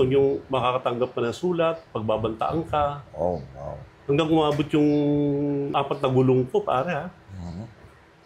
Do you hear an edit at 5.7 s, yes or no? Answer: yes